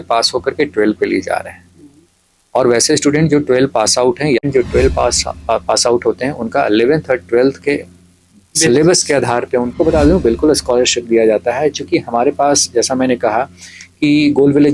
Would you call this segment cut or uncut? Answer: cut